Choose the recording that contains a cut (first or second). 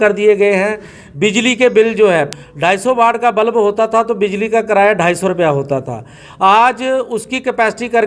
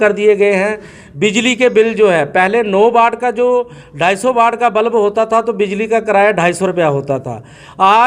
first